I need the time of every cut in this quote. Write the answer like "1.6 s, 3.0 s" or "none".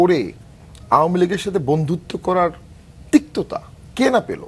none